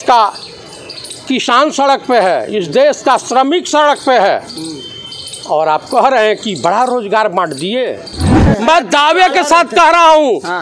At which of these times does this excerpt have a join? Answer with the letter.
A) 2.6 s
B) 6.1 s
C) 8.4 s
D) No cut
C